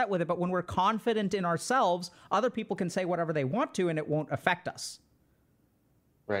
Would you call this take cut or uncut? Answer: uncut